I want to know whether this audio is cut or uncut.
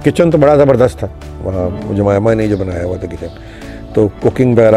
uncut